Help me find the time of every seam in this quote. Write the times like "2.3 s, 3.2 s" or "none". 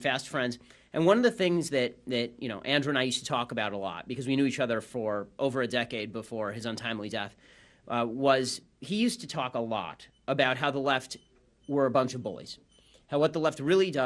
6.0 s